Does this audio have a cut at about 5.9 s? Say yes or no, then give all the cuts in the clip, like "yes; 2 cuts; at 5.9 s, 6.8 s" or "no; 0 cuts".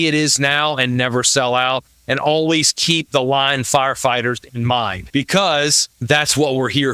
yes; 2 cuts; at 5.0 s, 5.9 s